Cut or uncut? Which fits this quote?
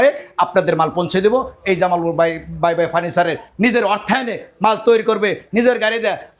uncut